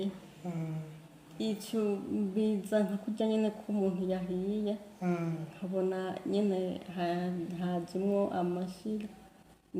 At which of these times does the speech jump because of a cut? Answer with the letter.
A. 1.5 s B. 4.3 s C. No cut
C